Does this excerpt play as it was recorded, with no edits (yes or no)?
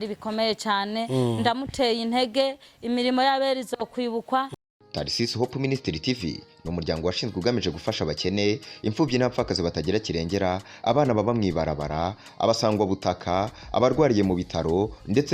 no